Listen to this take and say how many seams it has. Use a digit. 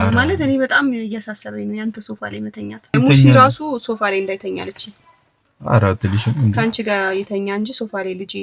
1